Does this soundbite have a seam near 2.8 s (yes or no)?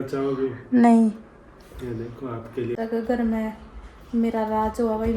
yes